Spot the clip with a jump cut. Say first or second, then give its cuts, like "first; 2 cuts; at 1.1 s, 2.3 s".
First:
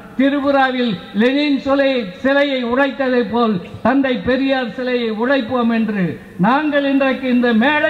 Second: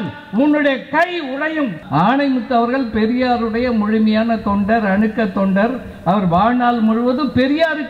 second; 1 cut; at 1.8 s